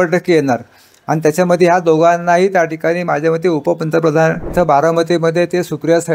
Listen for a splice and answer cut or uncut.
cut